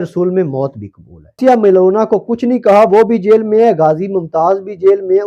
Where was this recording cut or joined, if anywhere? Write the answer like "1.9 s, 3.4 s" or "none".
1.4 s

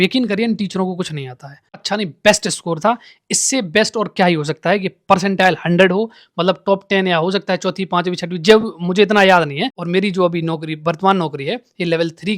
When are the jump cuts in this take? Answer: 1.8 s, 9.7 s

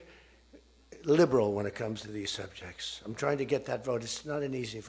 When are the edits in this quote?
none

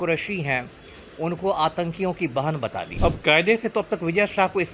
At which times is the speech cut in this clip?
2.9 s

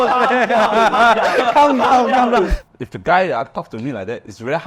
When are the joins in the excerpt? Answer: 2.6 s

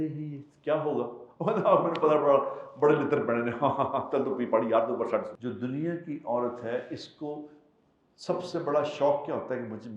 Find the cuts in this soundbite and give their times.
5.3 s

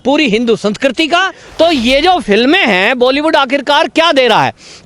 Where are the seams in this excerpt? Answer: 1.4 s

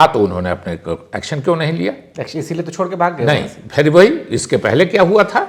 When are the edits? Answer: none

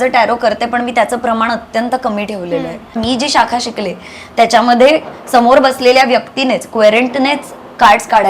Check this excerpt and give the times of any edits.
2.9 s

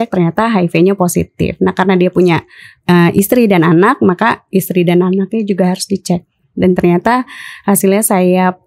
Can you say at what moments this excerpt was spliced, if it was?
none

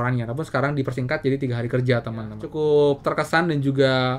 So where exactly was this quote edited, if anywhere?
2.4 s

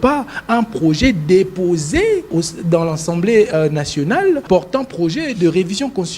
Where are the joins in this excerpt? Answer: 2.3 s, 4.4 s

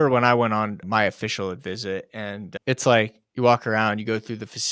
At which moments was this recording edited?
0.8 s, 2.5 s

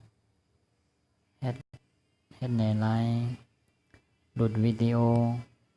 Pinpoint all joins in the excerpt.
none

